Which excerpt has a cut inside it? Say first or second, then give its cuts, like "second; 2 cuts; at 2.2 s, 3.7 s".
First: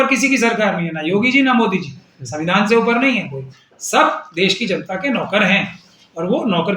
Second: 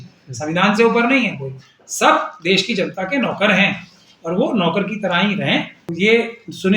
second; 1 cut; at 5.8 s